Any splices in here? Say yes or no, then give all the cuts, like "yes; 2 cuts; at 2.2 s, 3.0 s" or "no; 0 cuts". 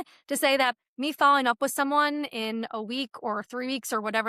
no; 0 cuts